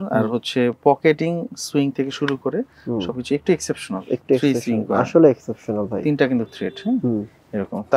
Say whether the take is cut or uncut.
uncut